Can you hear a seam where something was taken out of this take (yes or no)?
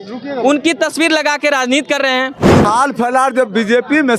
yes